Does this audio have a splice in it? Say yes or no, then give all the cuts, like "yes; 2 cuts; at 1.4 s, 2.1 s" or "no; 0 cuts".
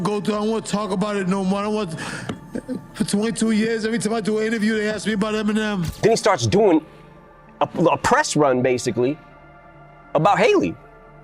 yes; 1 cut; at 5.9 s